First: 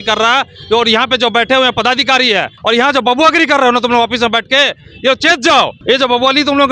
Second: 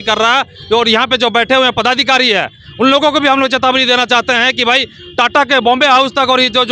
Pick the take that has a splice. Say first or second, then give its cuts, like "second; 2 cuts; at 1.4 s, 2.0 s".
first; 2 cuts; at 2.5 s, 5.8 s